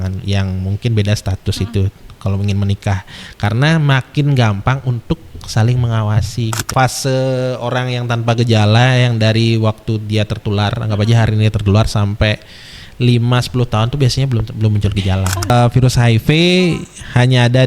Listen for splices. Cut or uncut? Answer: cut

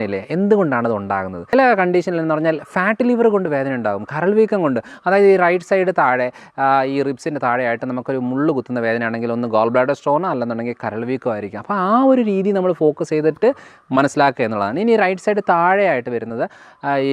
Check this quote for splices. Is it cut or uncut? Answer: cut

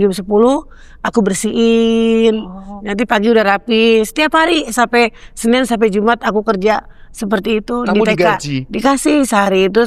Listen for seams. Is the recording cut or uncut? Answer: uncut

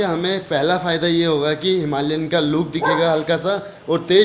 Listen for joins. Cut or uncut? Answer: uncut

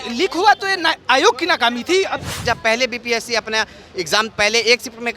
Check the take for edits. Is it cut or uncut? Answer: cut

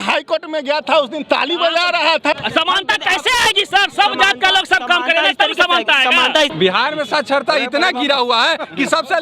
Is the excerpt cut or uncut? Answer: cut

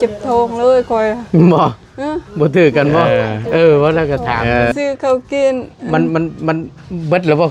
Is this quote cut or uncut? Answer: cut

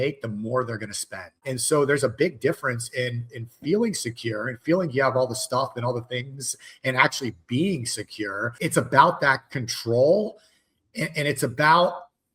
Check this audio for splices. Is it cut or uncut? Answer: cut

